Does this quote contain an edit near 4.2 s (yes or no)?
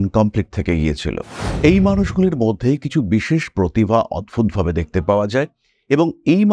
no